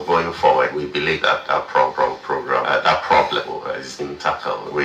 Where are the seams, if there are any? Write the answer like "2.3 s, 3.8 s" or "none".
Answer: 1.9 s, 4.0 s

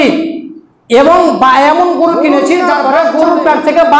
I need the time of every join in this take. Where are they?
2.7 s

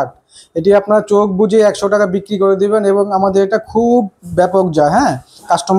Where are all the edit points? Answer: none

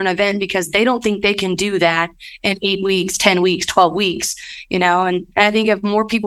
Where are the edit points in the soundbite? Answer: 5.3 s

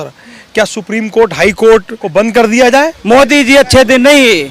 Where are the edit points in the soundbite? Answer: 2.0 s, 3.0 s

